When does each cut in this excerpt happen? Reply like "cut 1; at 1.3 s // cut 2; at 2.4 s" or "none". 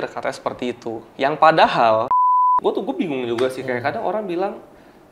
cut 1; at 2.4 s

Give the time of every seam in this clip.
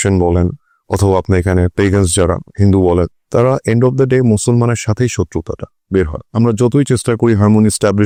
none

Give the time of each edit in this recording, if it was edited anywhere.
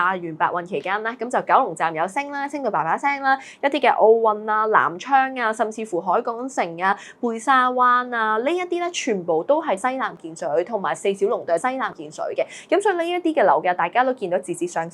none

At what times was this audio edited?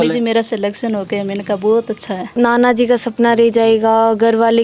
cut 1; at 2.2 s

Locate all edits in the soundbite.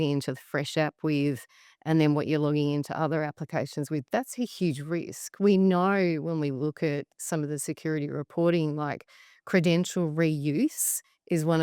cut 1; at 7.1 s

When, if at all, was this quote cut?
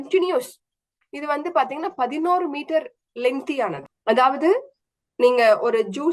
cut 1; at 3.9 s

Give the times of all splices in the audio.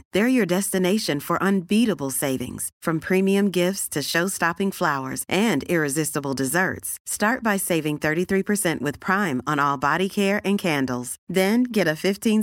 none

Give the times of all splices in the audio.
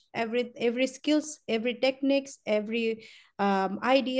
none

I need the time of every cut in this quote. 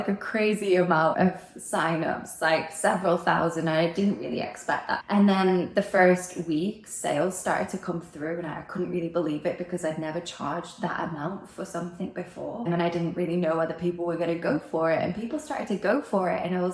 cut 1; at 1.1 s // cut 2; at 5.0 s // cut 3; at 12.7 s

